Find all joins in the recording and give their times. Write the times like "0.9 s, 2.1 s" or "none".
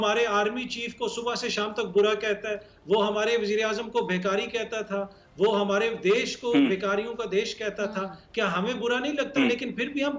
none